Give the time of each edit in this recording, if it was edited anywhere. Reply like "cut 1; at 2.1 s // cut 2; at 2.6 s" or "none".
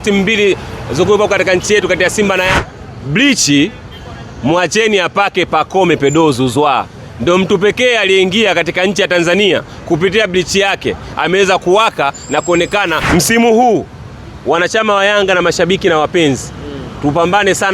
cut 1; at 2.5 s // cut 2; at 13.0 s